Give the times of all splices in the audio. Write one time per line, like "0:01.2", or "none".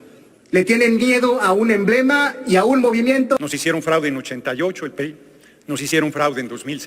0:03.4